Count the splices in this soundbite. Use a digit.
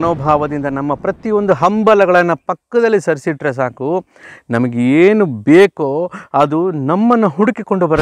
0